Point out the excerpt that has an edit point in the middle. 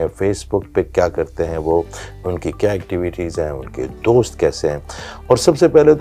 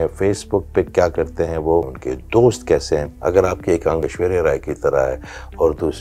second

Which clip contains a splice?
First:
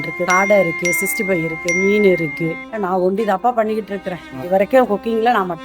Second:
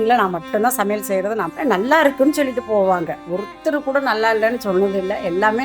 second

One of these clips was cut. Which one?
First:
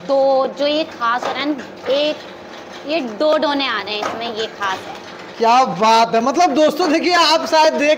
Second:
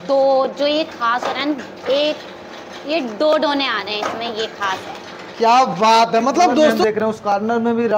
second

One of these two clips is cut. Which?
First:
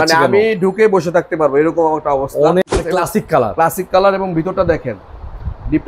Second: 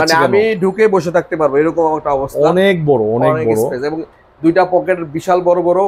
first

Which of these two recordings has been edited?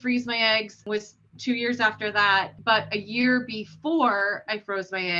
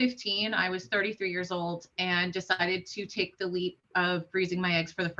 first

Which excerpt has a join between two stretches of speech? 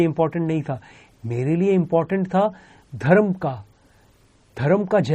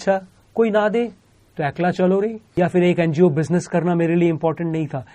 second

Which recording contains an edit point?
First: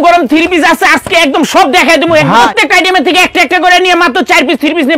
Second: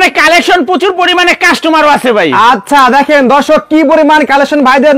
first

